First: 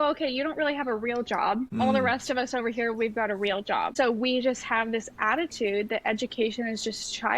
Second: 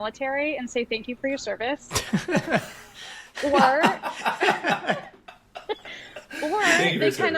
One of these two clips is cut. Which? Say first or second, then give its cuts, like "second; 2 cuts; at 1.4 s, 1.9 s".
first; 2 cuts; at 1.8 s, 3.9 s